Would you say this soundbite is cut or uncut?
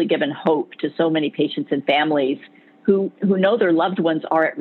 uncut